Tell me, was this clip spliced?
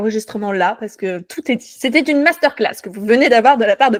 no; 0 cuts

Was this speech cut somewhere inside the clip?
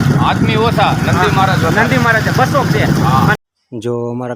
yes; 1 cut; at 3.4 s

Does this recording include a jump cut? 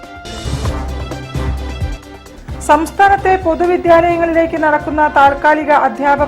no; 0 cuts

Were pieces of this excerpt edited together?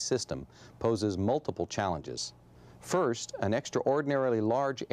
yes; 1 cut; at 1.2 s

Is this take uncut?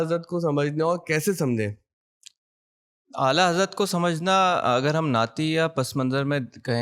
yes; 0 cuts

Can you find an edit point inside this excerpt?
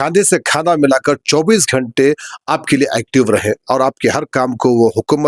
no; 0 cuts

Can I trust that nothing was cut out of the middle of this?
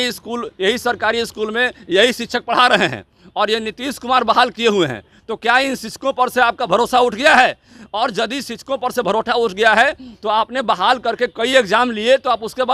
yes; 0 cuts

